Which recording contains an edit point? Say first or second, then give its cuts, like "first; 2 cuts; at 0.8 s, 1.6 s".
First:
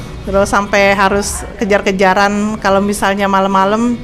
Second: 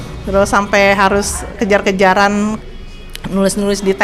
second; 1 cut; at 2.6 s